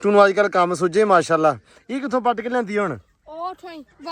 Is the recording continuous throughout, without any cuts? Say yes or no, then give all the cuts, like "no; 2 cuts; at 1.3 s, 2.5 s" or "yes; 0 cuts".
yes; 0 cuts